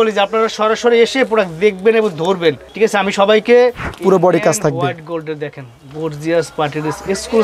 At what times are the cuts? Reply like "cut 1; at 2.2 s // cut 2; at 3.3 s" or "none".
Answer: cut 1; at 2.7 s // cut 2; at 3.9 s